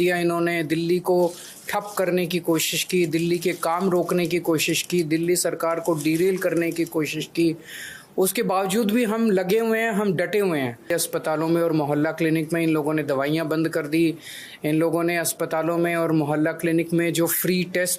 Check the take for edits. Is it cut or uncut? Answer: cut